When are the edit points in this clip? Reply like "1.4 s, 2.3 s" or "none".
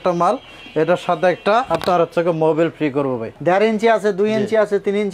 3.4 s